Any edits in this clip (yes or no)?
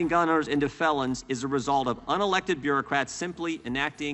no